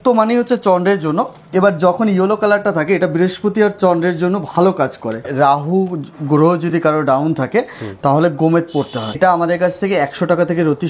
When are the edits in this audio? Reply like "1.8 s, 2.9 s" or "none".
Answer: 5.3 s, 9.2 s